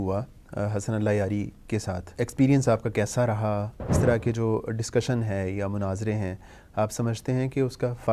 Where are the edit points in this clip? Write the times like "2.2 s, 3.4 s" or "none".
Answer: 2.0 s, 3.9 s